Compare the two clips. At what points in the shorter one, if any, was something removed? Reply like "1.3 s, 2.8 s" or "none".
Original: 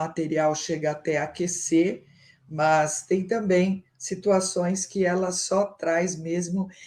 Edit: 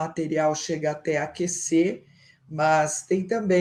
none